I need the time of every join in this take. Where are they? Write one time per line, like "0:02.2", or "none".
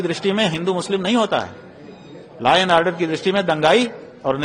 none